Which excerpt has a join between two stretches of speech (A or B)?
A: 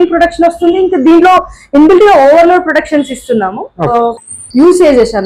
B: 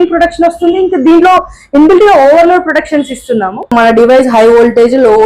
B